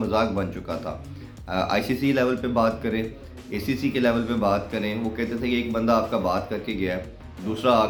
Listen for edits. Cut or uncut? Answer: uncut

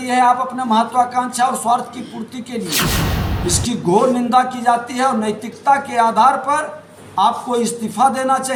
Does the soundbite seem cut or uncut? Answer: uncut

